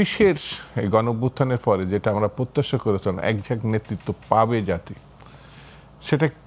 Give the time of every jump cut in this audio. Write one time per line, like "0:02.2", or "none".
none